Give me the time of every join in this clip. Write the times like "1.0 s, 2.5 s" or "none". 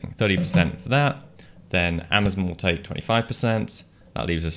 none